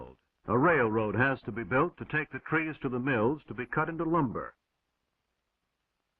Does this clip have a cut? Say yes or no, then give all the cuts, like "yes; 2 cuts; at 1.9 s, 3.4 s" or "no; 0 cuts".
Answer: yes; 1 cut; at 2.0 s